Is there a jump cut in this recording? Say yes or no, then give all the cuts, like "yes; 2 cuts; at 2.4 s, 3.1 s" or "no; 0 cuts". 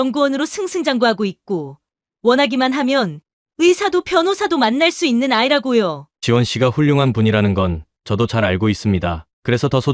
yes; 1 cut; at 6.1 s